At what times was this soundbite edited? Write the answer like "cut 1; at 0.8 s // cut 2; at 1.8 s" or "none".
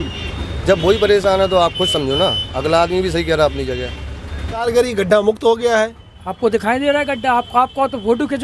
cut 1; at 4.6 s